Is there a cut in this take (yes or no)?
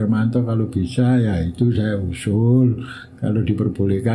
no